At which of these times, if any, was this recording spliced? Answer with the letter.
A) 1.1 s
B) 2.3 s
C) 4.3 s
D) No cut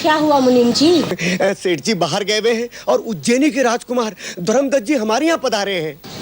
A